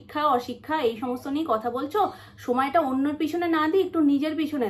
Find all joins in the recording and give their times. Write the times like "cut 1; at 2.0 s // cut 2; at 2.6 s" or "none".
none